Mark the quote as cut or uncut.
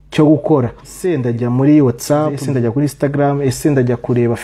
cut